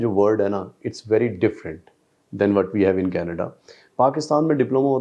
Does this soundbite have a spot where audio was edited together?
no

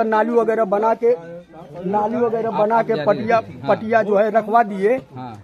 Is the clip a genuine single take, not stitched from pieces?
yes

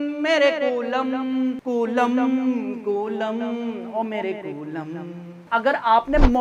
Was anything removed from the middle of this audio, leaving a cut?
yes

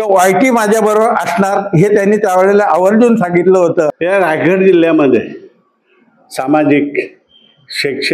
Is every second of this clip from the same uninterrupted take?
no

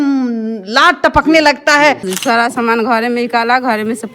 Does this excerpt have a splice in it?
yes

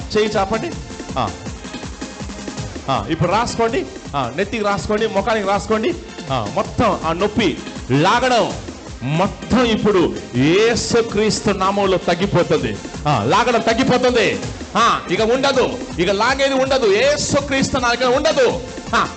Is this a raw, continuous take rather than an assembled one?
yes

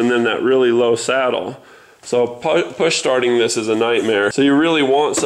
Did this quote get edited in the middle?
yes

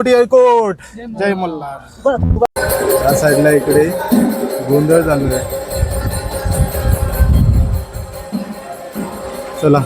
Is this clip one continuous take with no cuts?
no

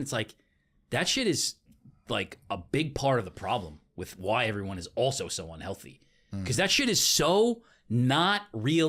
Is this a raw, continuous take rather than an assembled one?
yes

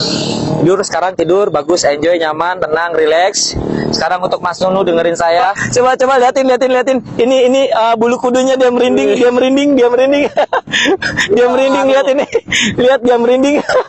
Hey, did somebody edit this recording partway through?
yes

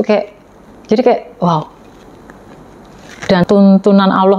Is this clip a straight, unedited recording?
no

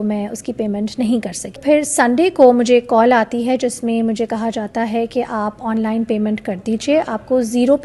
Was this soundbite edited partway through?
yes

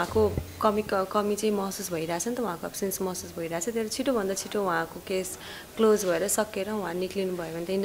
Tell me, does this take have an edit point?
no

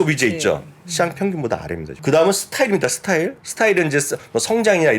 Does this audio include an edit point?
yes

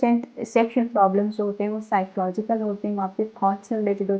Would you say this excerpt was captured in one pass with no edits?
yes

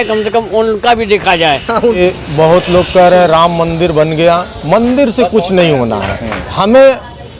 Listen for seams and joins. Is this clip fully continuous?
no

